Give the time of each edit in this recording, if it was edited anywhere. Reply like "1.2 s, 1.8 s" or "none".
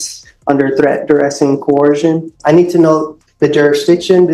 2.3 s